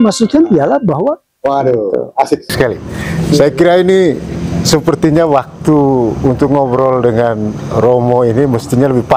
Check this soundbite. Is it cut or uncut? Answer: cut